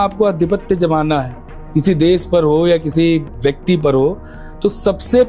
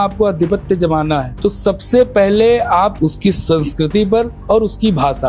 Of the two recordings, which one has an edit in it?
second; 3 cuts; at 1.3 s, 2.9 s, 4.4 s

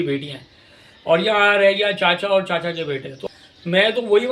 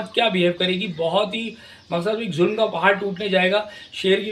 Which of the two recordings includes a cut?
first; 1 cut; at 3.1 s

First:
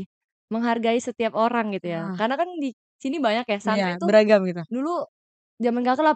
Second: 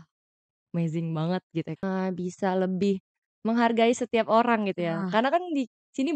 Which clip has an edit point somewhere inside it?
second; 1 cut; at 1.8 s

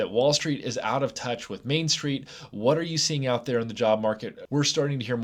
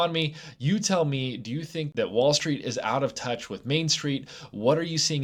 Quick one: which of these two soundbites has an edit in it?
first; 1 cut; at 4.3 s

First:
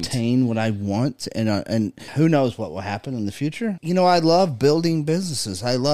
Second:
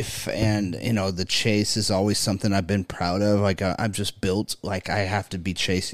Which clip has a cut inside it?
first; 2 cuts; at 2.0 s, 3.7 s

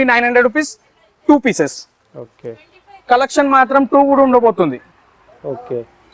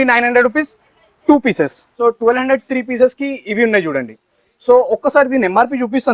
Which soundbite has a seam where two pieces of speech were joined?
second; 1 cut; at 1.9 s

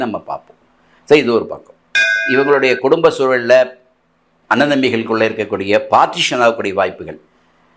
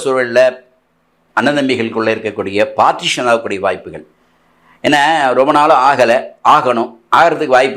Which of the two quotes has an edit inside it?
first; 1 cut; at 2.2 s

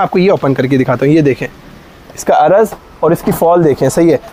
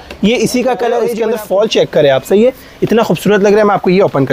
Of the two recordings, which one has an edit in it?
second; 1 cut; at 1.1 s

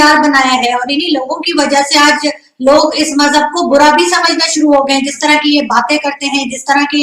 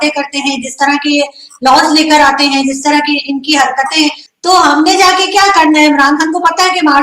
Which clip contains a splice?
second; 1 cut; at 4.3 s

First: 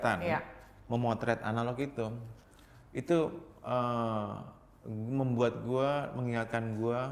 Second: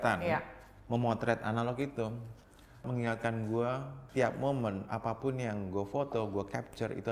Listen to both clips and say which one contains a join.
second; 2 cuts; at 2.8 s, 4.0 s

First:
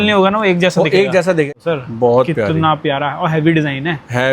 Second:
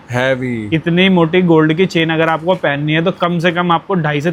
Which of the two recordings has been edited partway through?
first; 1 cut; at 1.5 s

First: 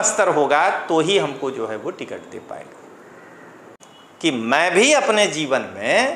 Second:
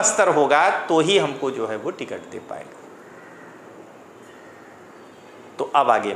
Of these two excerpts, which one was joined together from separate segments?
first; 1 cut; at 3.7 s

